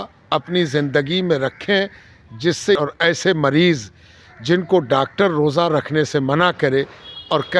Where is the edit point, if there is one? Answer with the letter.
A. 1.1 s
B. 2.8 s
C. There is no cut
B